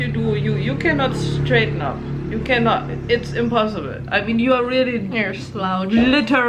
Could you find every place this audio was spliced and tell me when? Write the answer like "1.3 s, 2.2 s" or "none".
none